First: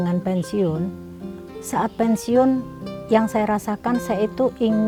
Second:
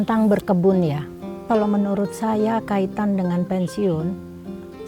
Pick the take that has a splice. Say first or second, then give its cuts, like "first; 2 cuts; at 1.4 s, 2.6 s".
second; 1 cut; at 1.5 s